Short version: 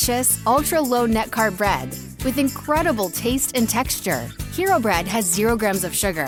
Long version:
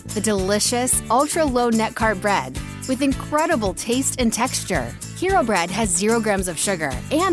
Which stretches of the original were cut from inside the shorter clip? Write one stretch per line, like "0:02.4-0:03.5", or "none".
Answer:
none